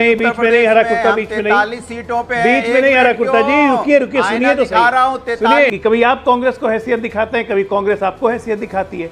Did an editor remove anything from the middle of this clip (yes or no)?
yes